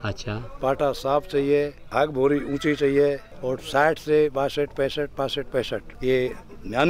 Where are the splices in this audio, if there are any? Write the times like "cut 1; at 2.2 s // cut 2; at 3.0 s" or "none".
cut 1; at 1.8 s // cut 2; at 3.3 s // cut 3; at 5.9 s